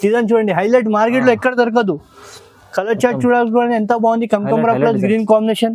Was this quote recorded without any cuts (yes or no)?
yes